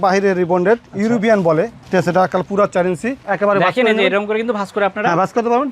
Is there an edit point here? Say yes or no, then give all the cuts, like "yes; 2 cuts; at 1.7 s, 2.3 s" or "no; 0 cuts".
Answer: yes; 1 cut; at 3.2 s